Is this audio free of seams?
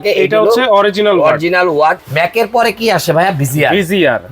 no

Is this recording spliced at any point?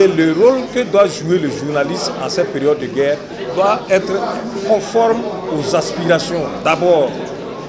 no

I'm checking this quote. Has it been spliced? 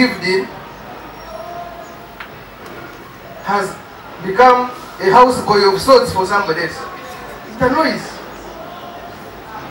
no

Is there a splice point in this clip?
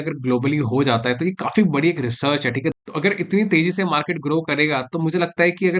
yes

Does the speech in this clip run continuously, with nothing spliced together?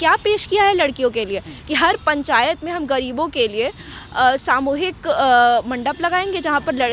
yes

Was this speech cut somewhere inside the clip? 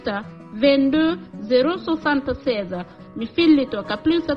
yes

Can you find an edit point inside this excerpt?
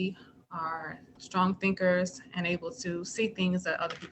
yes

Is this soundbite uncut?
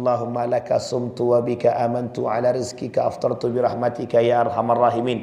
yes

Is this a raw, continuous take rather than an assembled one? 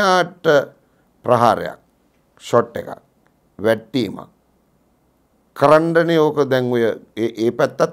yes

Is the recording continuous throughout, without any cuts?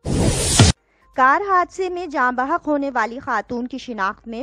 no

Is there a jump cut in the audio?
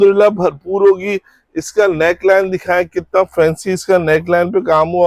no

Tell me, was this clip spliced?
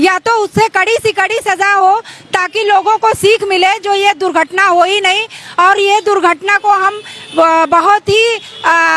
no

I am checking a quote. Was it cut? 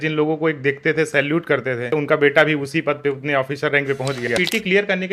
yes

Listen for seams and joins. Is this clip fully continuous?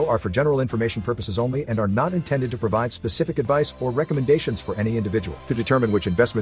yes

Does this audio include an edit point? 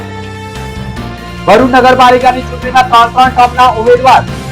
yes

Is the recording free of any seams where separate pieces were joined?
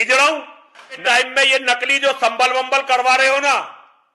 no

